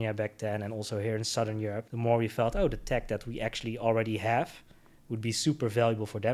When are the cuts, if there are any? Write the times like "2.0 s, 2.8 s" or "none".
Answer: 1.9 s